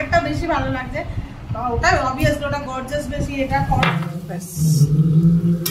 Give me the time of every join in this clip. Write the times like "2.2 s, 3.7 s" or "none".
3.8 s